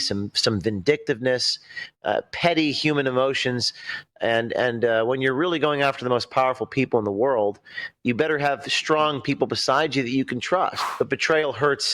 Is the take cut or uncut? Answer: cut